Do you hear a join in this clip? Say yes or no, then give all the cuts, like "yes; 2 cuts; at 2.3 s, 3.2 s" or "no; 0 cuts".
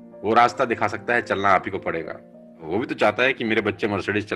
yes; 1 cut; at 2.6 s